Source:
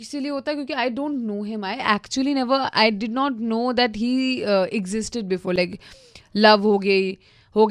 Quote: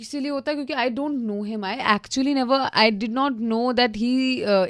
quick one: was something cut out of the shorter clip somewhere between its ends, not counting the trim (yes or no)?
no